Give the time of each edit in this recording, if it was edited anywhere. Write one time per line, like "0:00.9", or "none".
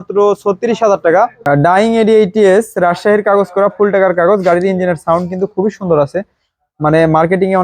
0:01.4